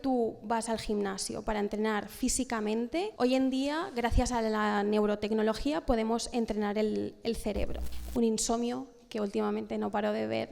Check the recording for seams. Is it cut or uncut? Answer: cut